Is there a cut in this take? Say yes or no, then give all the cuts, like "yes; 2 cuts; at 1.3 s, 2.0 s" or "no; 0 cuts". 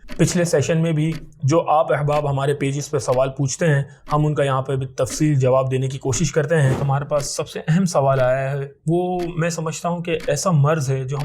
yes; 1 cut; at 6.8 s